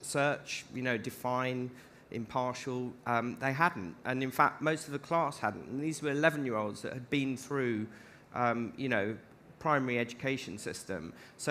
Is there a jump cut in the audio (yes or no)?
yes